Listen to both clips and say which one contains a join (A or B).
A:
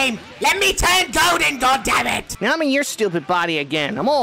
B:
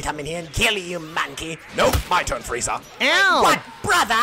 A